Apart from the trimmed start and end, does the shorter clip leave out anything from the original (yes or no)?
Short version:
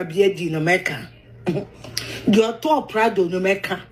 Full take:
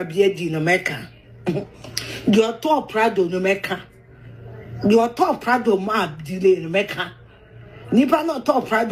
no